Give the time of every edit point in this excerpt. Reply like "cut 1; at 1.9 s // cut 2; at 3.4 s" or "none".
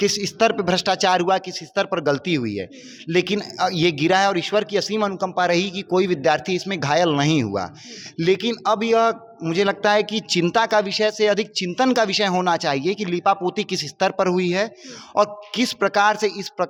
none